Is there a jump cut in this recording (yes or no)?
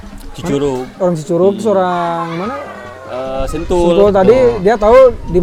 no